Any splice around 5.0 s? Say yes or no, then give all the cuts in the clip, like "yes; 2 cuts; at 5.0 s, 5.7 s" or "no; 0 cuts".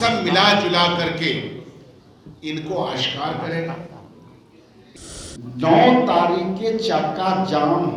yes; 1 cut; at 5.0 s